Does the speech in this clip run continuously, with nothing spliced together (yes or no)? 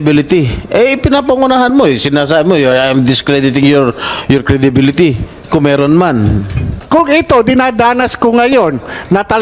no